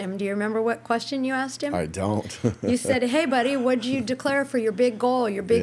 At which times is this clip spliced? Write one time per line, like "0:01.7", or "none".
none